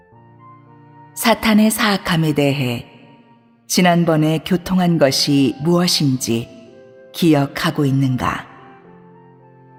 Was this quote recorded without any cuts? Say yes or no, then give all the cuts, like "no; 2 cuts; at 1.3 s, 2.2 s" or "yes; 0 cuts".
yes; 0 cuts